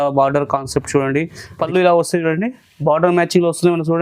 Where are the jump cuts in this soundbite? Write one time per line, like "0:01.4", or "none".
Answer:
0:01.6